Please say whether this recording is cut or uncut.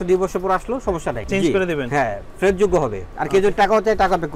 cut